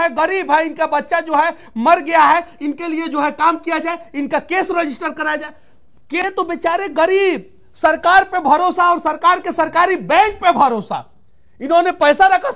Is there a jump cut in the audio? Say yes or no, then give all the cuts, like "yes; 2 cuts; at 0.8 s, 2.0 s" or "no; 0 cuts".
yes; 1 cut; at 6.2 s